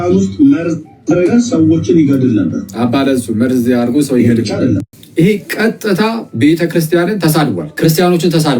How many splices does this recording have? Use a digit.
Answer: 2